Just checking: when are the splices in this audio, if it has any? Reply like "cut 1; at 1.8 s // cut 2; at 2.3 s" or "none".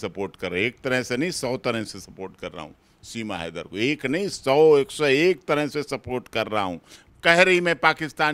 cut 1; at 7.0 s